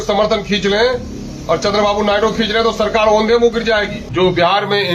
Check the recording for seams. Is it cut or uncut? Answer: cut